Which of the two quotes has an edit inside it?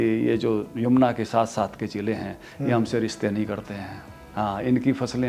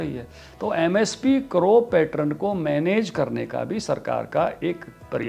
first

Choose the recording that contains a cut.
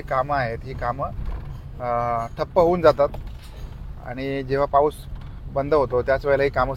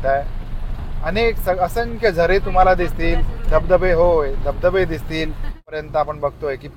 second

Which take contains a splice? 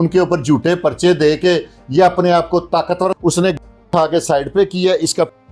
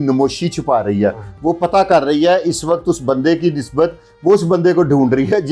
first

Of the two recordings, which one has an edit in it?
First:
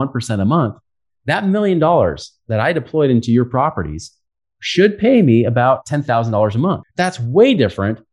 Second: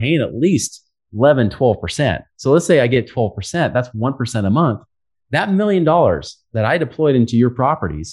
first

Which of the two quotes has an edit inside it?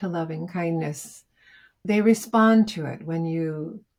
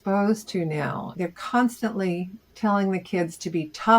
second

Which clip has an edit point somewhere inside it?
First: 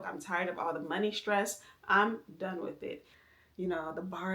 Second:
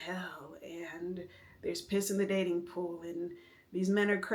first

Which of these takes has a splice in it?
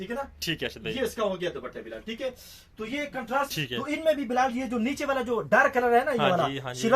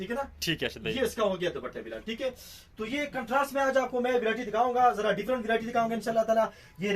first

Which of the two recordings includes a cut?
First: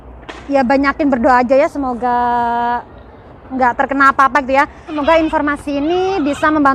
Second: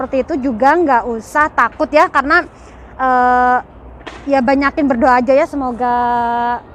first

